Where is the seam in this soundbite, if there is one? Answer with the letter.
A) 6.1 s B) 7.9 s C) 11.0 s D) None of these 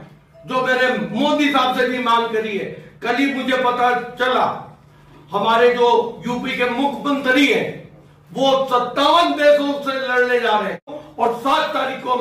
C